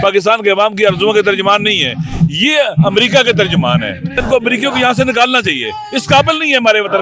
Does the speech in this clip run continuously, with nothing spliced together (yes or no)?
no